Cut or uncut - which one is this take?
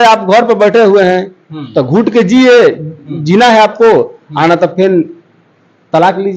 uncut